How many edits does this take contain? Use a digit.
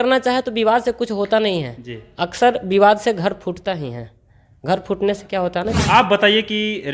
1